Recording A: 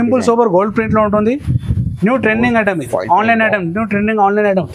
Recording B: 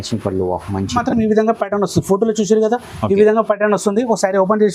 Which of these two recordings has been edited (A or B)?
B